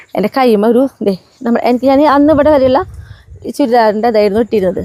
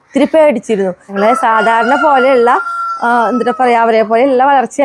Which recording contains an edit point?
second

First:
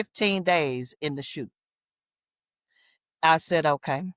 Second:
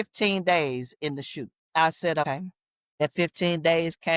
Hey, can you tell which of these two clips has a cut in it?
second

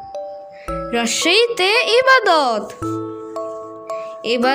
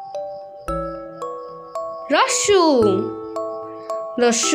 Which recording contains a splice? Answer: first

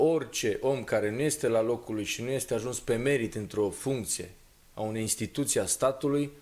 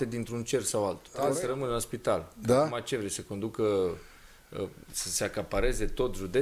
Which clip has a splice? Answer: second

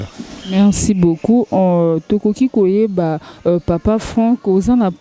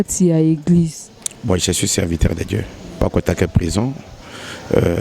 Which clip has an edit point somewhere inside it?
second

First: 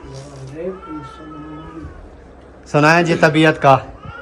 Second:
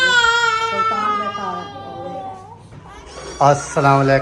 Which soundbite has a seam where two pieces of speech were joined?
second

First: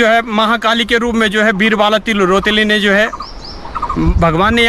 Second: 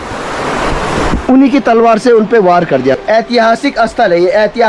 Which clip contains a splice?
second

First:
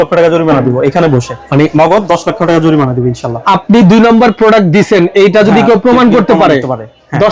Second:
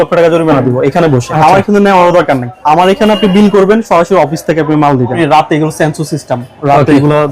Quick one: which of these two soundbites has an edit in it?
second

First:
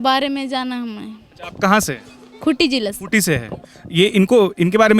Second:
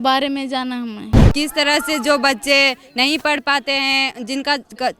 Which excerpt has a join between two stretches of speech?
second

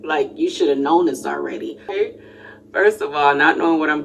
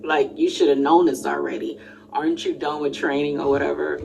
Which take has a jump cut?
first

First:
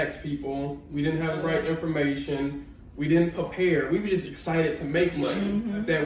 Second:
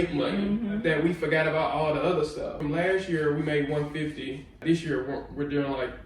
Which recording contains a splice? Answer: second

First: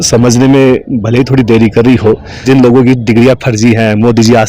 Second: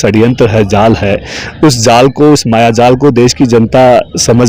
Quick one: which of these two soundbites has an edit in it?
first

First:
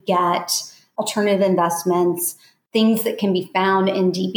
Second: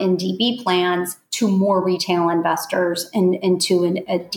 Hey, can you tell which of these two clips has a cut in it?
first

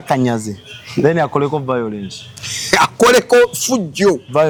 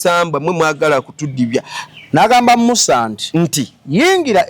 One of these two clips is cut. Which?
second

